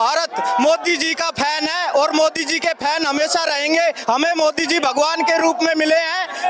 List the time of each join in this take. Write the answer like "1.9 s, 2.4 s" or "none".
none